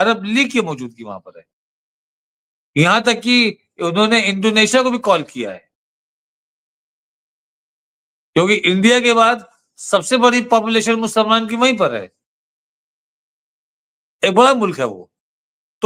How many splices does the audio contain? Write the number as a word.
zero